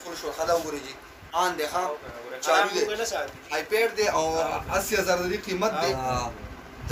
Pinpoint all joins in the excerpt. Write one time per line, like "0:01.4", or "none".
0:06.0